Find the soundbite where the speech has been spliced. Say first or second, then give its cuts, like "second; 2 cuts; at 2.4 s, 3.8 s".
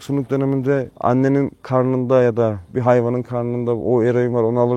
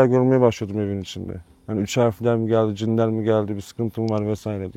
first; 3 cuts; at 0.9 s, 1.6 s, 2.7 s